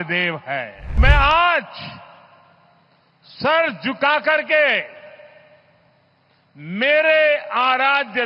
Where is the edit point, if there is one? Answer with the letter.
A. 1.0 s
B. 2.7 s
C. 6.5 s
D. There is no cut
A